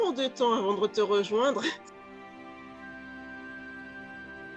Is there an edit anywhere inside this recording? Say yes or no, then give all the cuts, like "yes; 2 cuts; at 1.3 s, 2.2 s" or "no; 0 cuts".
yes; 1 cut; at 1.8 s